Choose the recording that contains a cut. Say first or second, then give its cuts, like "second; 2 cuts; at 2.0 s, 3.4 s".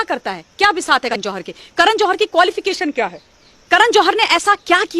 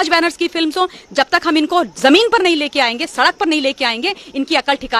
first; 1 cut; at 1.1 s